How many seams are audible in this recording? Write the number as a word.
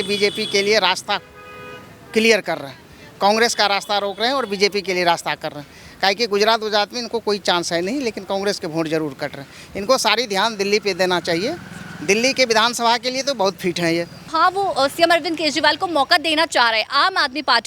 one